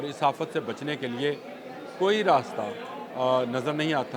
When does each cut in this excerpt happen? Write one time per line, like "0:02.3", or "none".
none